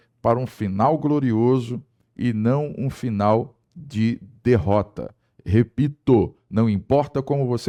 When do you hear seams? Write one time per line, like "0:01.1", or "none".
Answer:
none